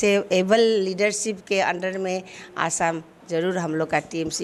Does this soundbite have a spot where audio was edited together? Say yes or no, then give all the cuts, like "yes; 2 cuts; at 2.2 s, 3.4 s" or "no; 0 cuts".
no; 0 cuts